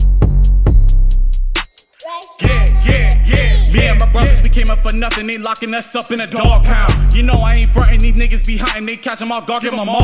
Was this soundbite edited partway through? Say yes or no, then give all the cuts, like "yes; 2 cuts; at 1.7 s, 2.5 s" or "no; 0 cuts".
yes; 1 cut; at 1.8 s